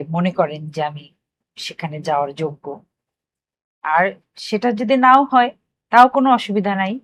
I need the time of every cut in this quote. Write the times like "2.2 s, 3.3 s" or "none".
none